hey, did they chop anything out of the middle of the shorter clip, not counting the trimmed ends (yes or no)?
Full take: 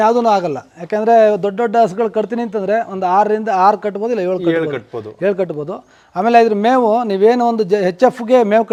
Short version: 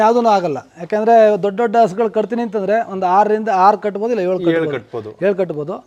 no